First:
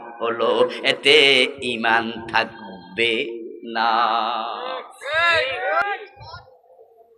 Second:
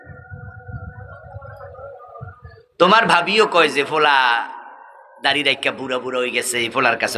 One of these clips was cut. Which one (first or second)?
first